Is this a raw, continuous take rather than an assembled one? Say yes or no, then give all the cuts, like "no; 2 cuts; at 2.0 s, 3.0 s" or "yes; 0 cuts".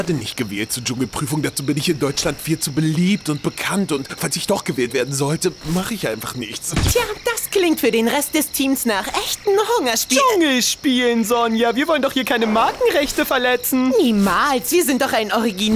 yes; 0 cuts